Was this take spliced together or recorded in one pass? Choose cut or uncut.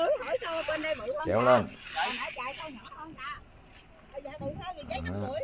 uncut